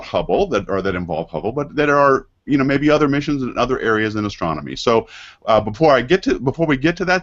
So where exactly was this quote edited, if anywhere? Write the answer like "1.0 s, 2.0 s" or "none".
none